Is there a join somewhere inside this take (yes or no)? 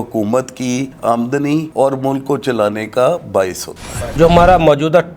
yes